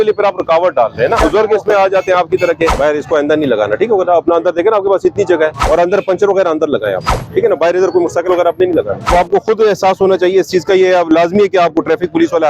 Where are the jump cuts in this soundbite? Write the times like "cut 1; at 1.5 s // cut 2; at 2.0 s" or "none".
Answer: cut 1; at 1.2 s // cut 2; at 2.7 s // cut 3; at 5.6 s // cut 4; at 9.1 s